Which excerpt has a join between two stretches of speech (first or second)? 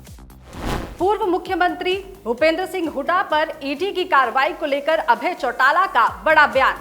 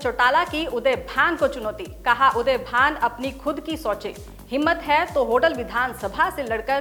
first